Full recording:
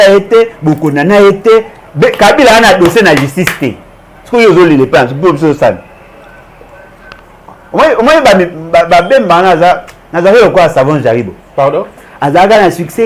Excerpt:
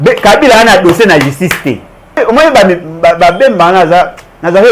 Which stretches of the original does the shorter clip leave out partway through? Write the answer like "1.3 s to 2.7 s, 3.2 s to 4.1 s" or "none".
4.1 s to 7.9 s